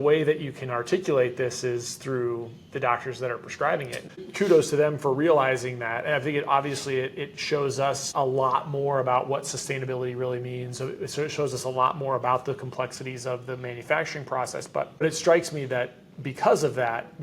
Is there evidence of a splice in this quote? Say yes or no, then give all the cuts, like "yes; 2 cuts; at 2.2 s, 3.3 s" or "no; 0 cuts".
yes; 3 cuts; at 4.2 s, 8.1 s, 15.0 s